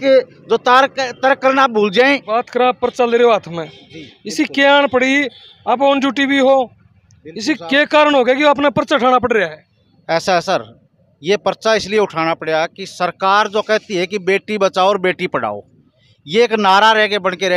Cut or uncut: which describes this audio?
cut